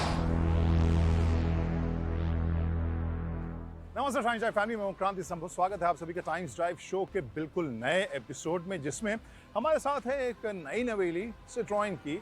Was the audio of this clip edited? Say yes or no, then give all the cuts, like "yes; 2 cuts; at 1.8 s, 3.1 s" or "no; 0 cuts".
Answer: yes; 1 cut; at 4.2 s